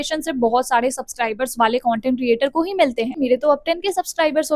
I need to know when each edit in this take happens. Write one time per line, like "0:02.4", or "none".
0:03.1